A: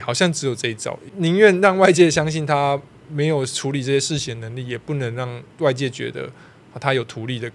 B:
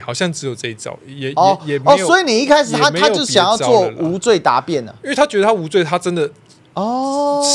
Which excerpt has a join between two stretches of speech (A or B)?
A